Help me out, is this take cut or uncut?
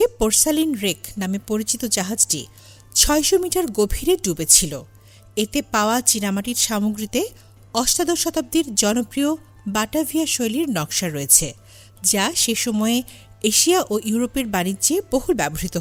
uncut